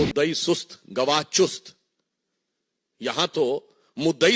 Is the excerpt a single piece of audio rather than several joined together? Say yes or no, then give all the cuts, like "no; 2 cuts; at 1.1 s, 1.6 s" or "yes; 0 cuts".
yes; 0 cuts